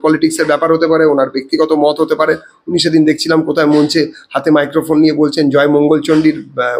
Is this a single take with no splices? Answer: yes; 0 cuts

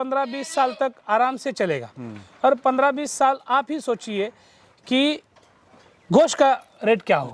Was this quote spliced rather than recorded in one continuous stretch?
no; 0 cuts

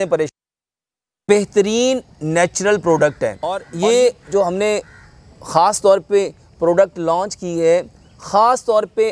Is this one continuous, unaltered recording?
no; 1 cut; at 3.7 s

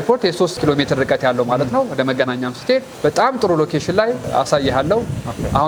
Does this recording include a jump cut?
no; 0 cuts

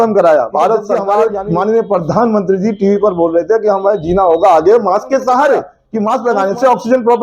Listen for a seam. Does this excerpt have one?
yes; 2 cuts; at 1.1 s, 5.8 s

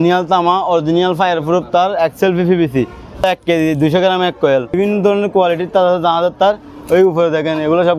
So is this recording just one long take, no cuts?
no; 2 cuts; at 3.2 s, 4.8 s

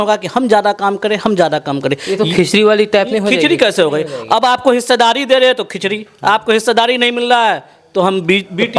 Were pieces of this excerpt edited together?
no; 0 cuts

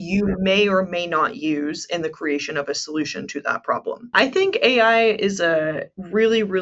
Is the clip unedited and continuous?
no; 1 cut; at 4.1 s

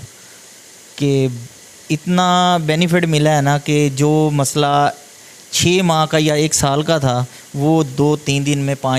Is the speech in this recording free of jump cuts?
yes; 0 cuts

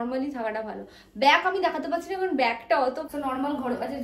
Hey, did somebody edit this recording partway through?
yes; 1 cut; at 3.1 s

